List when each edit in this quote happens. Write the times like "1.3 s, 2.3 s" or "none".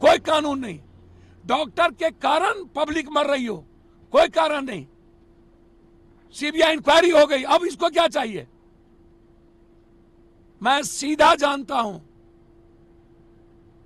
none